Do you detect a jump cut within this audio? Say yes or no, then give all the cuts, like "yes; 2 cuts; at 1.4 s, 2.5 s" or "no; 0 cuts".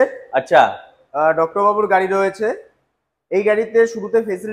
no; 0 cuts